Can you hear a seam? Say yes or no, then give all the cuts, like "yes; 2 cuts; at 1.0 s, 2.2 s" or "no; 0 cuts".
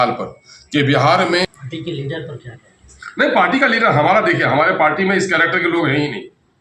yes; 1 cut; at 1.4 s